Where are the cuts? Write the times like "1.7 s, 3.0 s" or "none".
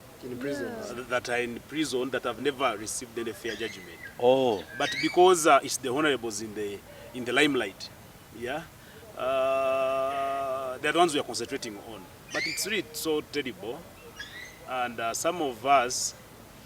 none